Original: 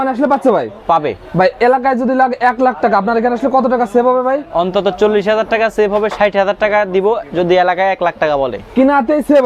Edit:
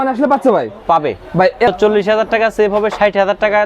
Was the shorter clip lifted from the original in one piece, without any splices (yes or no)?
no